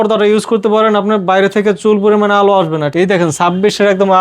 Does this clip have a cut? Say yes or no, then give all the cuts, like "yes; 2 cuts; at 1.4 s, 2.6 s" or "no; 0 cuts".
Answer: yes; 1 cut; at 2.9 s